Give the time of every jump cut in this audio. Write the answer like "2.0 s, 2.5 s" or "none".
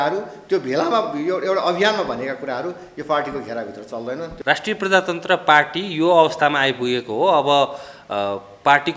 4.4 s